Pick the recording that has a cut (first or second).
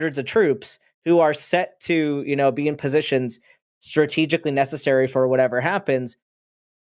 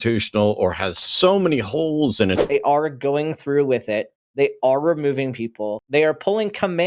second